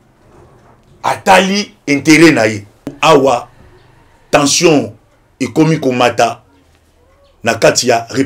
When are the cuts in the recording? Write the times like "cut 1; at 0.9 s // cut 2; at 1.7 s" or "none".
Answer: cut 1; at 3.0 s